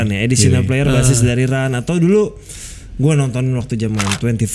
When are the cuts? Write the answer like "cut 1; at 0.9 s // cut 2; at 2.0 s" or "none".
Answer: none